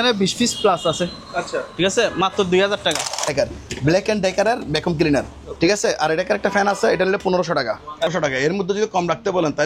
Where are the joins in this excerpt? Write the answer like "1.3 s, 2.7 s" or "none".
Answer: 3.3 s, 8.1 s